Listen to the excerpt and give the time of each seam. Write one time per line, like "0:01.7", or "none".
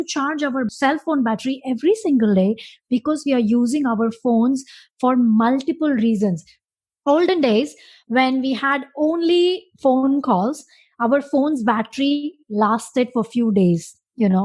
0:06.6